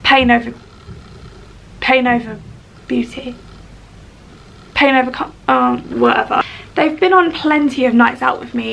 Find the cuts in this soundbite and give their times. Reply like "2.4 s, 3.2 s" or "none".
6.4 s